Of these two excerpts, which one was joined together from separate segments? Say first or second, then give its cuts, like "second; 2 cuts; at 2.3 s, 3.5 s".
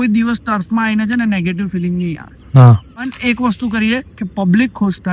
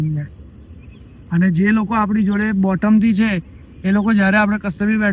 first; 1 cut; at 3.1 s